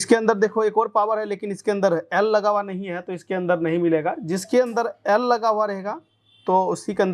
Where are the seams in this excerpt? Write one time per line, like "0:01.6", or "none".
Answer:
none